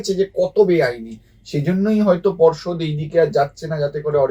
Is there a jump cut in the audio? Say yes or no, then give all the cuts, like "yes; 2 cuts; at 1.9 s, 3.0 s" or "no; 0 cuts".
no; 0 cuts